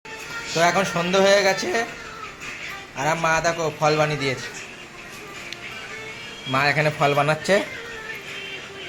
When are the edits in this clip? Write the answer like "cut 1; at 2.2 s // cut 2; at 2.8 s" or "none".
none